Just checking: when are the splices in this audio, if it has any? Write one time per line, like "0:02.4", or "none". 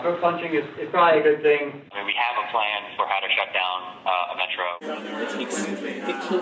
0:01.9
0:04.8